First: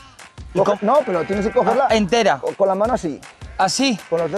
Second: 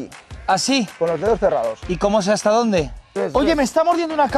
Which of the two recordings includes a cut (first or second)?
second